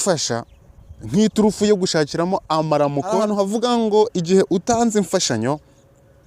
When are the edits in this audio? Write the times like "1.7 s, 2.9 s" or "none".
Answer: 3.2 s